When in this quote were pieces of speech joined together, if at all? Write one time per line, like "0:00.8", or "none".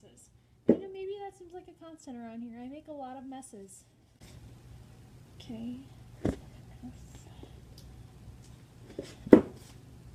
none